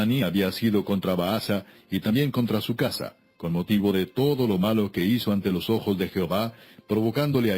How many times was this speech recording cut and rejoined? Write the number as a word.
one